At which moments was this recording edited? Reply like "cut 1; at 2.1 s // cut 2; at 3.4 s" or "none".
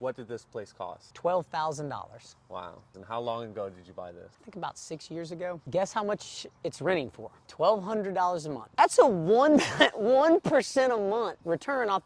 none